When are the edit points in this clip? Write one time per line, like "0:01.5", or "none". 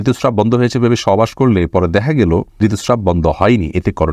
0:02.5